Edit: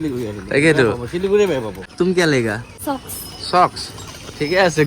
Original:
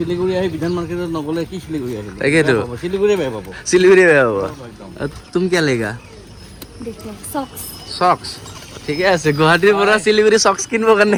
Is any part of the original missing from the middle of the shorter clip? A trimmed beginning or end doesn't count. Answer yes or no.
yes